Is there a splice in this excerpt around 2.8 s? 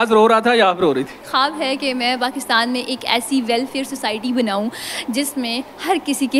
no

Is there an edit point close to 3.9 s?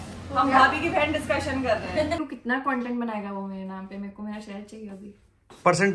no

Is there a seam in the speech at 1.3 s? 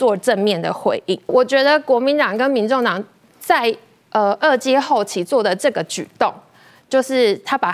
yes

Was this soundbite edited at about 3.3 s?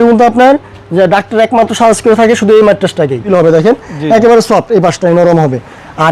yes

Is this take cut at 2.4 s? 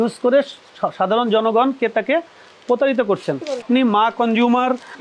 no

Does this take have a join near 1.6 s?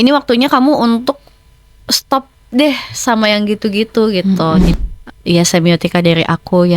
no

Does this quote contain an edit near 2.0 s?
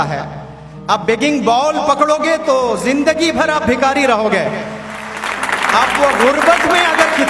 no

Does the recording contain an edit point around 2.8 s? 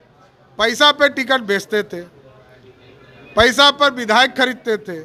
no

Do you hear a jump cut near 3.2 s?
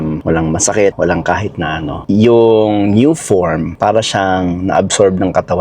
no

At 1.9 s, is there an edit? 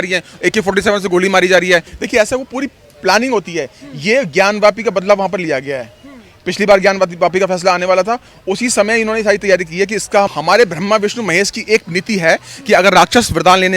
yes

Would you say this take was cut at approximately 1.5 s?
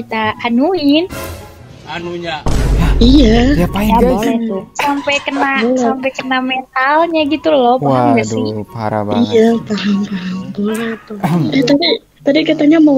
no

